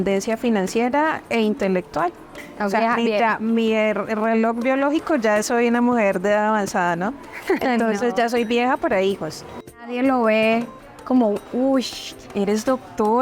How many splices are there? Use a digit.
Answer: 2